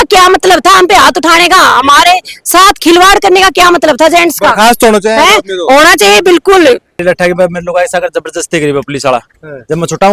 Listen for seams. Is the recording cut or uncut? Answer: cut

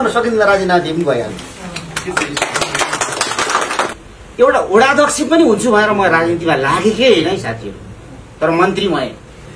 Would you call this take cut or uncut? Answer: cut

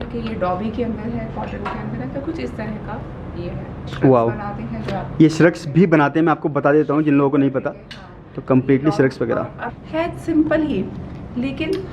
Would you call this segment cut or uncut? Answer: cut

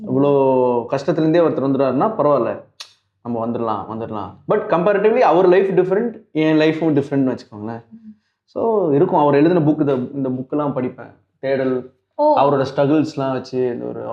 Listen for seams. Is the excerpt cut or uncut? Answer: uncut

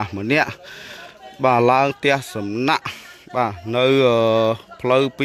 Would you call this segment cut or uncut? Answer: uncut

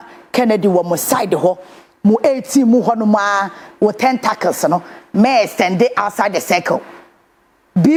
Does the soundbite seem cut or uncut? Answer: uncut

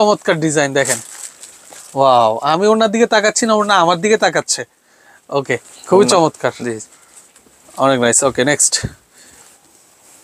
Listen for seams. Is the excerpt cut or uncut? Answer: uncut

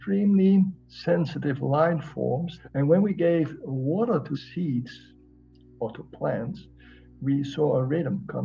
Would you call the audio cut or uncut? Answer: cut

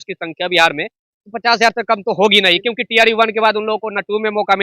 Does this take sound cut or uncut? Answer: uncut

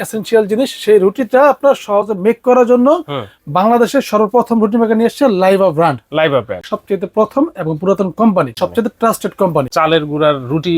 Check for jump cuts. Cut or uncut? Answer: cut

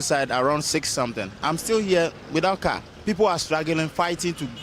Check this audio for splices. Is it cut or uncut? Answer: uncut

